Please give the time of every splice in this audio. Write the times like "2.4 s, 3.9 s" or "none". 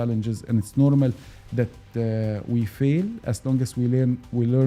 none